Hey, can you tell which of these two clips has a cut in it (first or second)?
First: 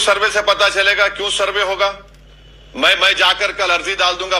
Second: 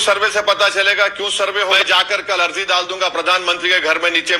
second